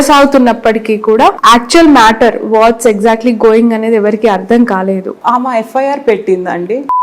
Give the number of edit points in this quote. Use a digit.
2